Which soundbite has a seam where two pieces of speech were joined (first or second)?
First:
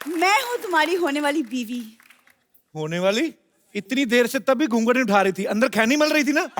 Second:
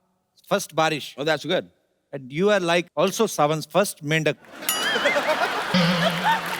second